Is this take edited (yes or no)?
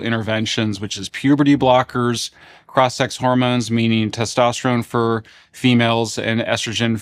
no